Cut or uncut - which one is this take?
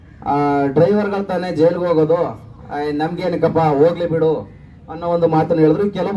uncut